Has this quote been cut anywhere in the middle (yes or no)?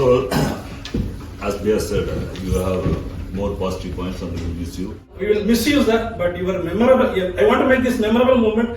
yes